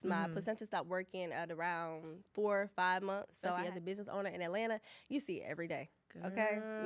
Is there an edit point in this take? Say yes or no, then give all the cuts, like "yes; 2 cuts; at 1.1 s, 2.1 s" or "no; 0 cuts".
yes; 1 cut; at 3.6 s